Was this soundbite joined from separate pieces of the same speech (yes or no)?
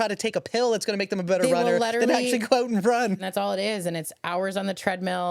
yes